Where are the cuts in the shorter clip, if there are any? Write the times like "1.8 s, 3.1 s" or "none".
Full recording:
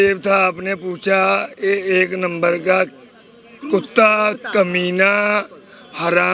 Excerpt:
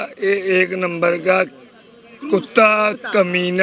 none